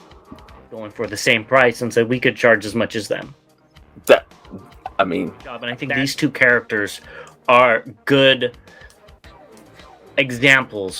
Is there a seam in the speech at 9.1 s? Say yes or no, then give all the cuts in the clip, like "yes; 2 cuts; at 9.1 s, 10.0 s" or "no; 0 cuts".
no; 2 cuts; at 0.9 s, 5.7 s